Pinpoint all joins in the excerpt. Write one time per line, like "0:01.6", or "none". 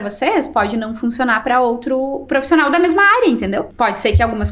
0:02.2
0:03.7